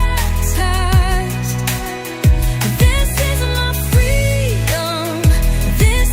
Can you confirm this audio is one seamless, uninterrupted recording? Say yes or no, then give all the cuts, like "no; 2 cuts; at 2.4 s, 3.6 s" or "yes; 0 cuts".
yes; 0 cuts